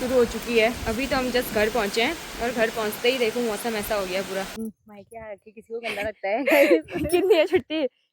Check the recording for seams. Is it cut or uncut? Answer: cut